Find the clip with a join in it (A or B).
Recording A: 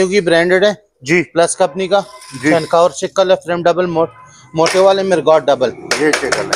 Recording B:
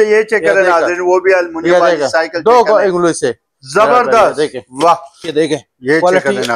B